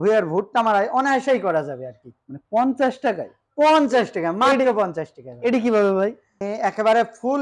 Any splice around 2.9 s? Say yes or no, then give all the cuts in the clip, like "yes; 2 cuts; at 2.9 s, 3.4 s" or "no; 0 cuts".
no; 1 cut; at 6.4 s